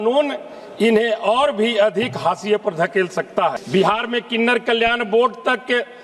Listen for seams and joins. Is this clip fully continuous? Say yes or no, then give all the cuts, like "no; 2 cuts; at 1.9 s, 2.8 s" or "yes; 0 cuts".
no; 1 cut; at 3.6 s